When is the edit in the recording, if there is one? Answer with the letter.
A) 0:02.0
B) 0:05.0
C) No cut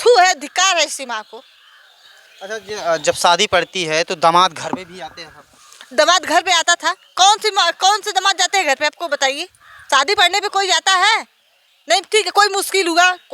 C